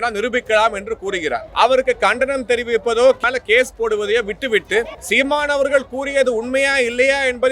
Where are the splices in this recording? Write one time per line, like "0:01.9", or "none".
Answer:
0:01.5
0:03.2
0:05.0

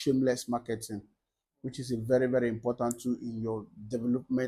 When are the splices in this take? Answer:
none

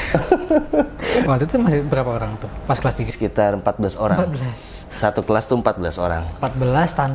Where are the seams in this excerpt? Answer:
0:01.2
0:03.1

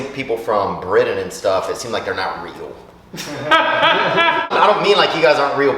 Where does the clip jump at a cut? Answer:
0:04.5

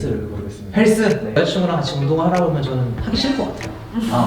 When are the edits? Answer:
0:01.4

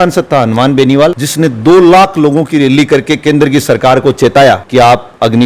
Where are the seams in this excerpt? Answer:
none

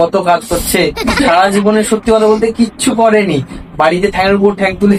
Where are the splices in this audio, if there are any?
none

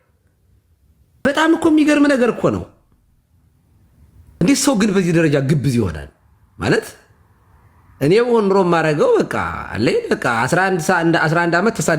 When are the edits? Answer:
0:01.2
0:04.4

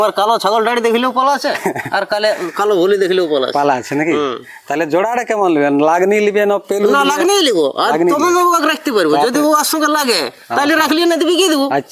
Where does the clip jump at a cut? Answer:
none

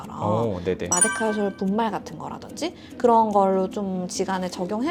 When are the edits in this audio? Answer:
none

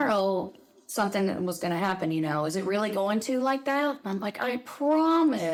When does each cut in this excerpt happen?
none

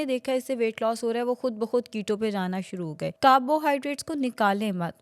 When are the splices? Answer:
0:03.1

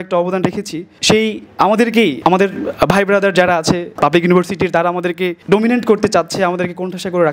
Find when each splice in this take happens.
0:01.3

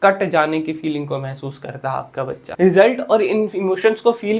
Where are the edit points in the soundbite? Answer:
0:02.4

